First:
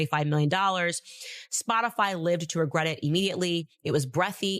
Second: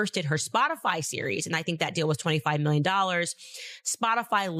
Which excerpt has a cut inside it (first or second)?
first